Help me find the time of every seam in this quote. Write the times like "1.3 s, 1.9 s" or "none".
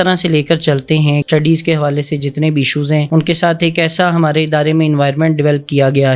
1.2 s